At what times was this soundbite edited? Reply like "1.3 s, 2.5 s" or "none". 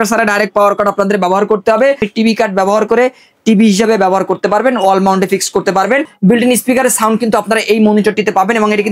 2.1 s, 6.1 s